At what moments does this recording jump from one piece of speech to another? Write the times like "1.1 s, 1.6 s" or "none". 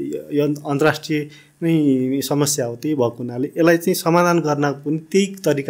none